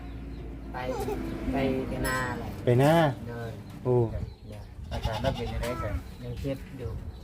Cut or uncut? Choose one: cut